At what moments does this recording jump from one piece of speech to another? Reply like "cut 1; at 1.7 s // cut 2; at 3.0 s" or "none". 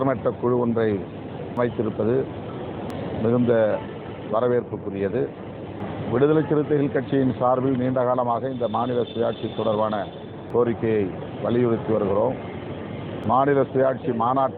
cut 1; at 1.6 s // cut 2; at 2.9 s // cut 3; at 5.8 s // cut 4; at 10.4 s // cut 5; at 13.2 s